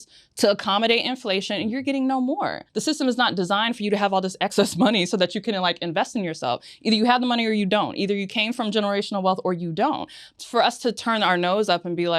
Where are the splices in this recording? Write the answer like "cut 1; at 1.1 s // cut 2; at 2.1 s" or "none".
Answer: cut 1; at 2.6 s // cut 2; at 10.3 s